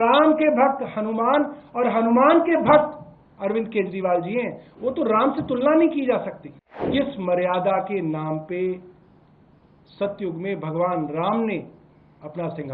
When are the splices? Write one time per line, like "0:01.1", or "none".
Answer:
0:06.9